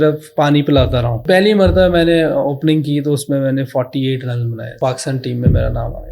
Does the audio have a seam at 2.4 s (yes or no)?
no